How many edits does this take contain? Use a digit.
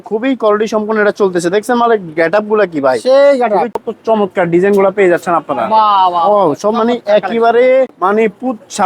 2